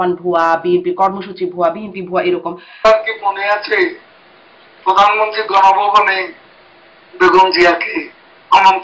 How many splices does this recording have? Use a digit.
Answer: 1